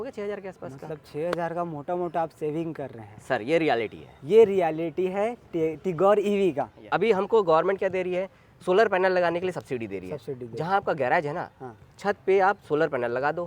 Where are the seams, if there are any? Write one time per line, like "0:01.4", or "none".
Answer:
0:06.7